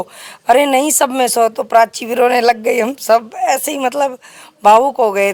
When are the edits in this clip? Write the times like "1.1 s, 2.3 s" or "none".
none